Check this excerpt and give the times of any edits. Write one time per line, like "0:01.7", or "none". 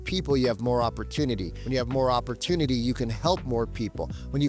0:01.5